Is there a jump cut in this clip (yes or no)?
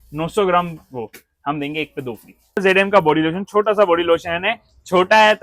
yes